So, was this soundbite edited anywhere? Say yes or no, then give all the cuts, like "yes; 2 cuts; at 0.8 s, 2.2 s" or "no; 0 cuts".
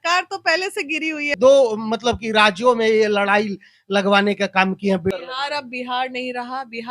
yes; 2 cuts; at 1.3 s, 5.1 s